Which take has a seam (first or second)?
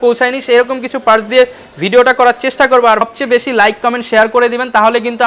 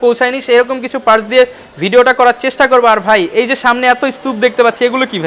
first